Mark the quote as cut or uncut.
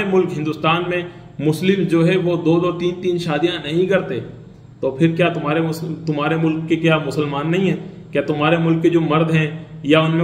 uncut